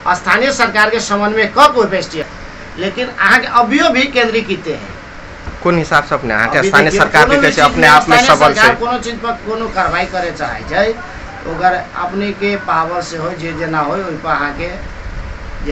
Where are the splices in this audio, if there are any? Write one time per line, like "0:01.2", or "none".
0:02.3